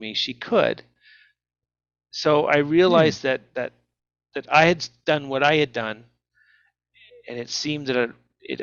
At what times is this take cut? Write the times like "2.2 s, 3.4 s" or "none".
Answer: none